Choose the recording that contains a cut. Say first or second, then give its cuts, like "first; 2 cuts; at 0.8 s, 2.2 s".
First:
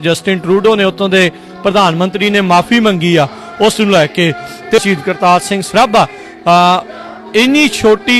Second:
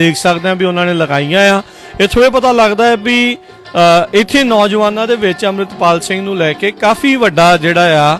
first; 1 cut; at 4.8 s